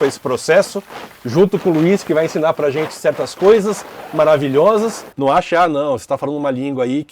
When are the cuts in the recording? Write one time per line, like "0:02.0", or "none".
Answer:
0:05.1